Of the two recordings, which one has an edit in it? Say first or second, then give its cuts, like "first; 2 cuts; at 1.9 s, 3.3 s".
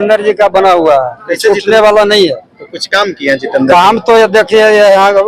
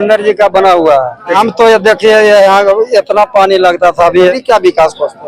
second; 2 cuts; at 1.4 s, 4.3 s